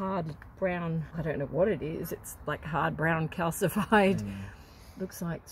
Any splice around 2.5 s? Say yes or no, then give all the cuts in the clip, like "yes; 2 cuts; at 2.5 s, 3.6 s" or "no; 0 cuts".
no; 1 cut; at 1.1 s